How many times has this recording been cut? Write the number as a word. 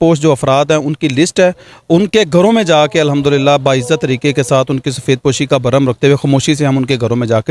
zero